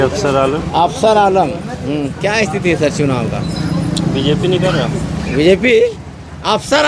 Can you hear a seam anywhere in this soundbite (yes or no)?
no